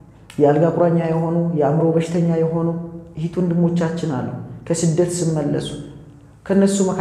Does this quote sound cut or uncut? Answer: uncut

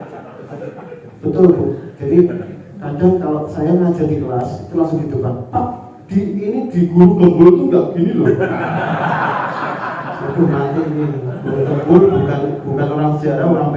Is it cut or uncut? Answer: uncut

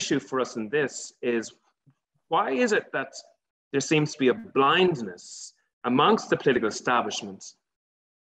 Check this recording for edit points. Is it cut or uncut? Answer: uncut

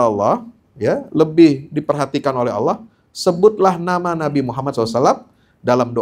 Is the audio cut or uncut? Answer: uncut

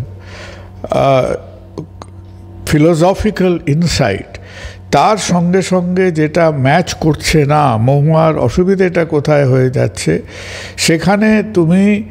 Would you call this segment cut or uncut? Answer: uncut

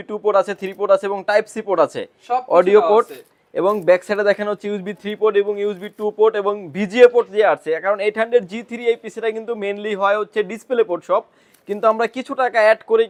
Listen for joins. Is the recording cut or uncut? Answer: uncut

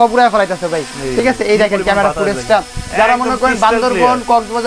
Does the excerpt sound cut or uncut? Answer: uncut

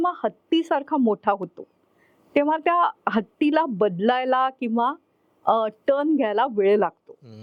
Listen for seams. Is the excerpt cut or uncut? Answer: uncut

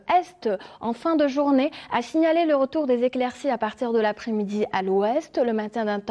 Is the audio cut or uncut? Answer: cut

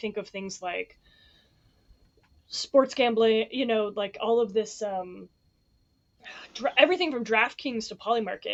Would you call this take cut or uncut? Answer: uncut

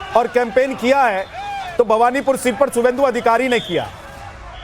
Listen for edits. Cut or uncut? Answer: cut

